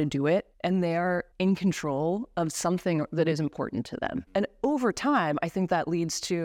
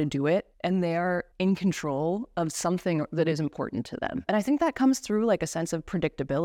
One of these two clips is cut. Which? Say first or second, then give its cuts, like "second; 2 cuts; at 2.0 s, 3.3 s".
first; 1 cut; at 4.2 s